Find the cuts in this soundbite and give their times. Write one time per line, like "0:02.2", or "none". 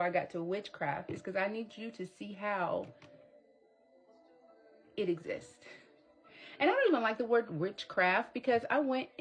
none

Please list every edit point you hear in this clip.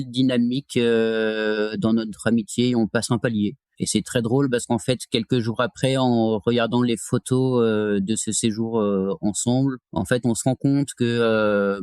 none

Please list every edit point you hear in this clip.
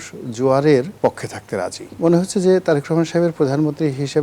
0:01.9

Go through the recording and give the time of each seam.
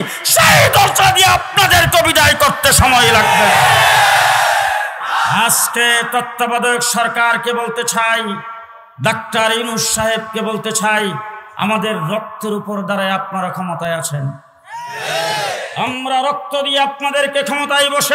0:05.0

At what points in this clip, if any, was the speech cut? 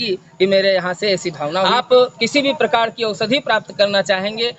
0:01.6

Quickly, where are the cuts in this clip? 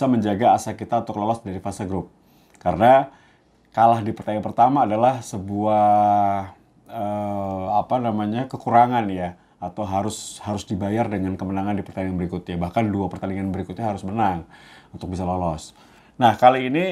none

